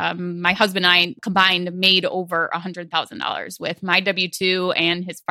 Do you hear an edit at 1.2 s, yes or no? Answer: yes